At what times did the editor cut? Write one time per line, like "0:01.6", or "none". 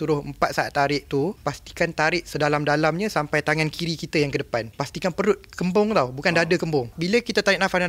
0:01.4
0:04.8
0:07.0